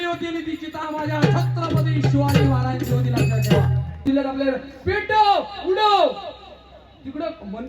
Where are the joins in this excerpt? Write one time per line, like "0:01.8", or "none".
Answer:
0:04.1